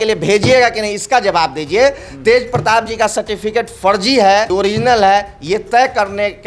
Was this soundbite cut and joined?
yes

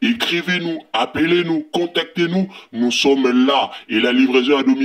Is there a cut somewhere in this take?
no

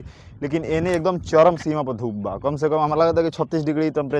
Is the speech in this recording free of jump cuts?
yes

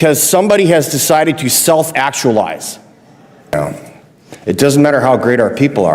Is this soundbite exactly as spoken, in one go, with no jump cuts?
no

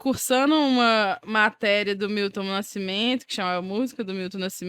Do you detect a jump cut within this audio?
no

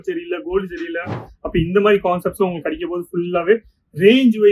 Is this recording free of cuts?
no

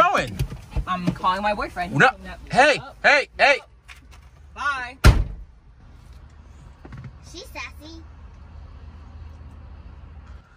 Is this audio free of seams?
yes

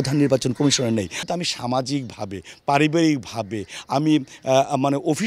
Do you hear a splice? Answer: yes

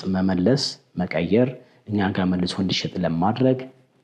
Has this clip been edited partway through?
no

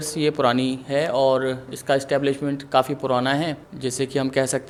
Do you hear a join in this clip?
no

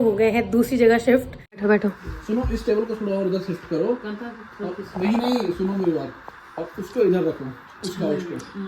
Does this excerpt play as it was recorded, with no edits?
no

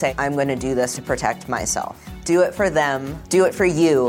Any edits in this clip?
no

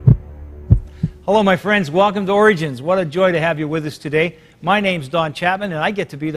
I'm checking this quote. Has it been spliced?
no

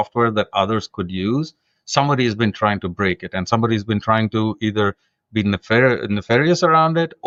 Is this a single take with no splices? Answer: yes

